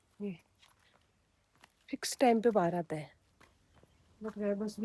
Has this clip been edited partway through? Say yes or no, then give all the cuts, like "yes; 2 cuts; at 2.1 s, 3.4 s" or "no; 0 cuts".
no; 0 cuts